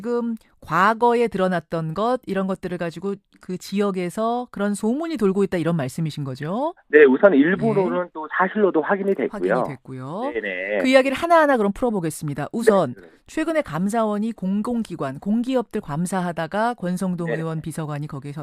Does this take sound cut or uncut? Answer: uncut